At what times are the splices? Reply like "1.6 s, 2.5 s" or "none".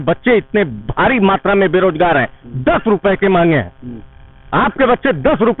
none